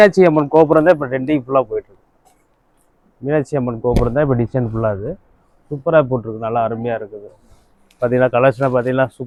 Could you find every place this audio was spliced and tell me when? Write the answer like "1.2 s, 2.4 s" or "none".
none